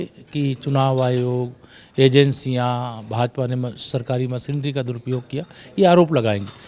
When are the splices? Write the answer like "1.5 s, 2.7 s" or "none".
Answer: none